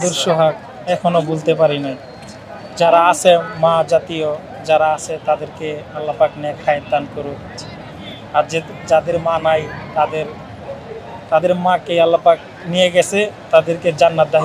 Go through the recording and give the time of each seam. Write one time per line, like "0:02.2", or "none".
none